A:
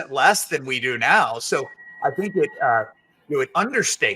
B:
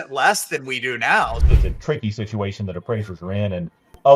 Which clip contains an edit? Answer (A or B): B